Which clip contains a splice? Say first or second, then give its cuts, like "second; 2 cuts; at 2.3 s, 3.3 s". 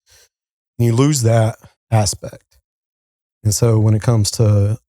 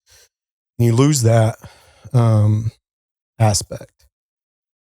first; 1 cut; at 1.7 s